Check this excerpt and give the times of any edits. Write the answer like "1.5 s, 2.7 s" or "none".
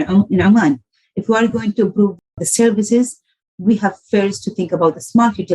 2.2 s